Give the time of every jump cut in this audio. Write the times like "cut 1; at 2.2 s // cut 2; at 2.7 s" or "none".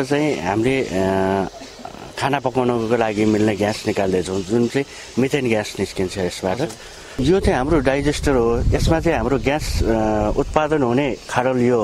cut 1; at 7.0 s